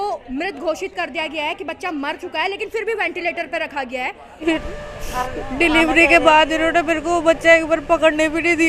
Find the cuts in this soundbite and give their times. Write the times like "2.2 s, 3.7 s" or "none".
4.4 s